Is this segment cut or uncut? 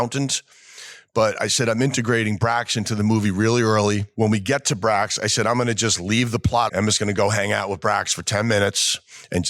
cut